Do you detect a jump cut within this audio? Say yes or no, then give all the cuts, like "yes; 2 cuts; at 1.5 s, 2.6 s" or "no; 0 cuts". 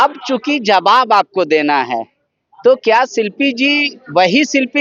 no; 0 cuts